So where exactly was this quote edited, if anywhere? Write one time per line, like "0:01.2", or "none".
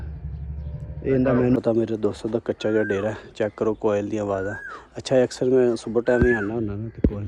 0:01.6